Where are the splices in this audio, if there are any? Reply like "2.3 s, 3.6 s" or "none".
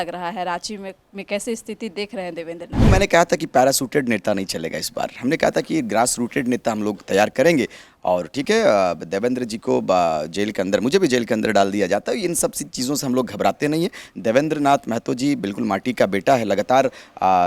2.9 s